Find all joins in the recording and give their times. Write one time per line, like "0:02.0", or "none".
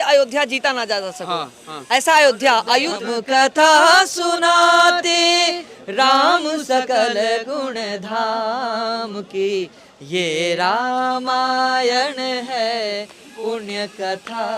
0:03.0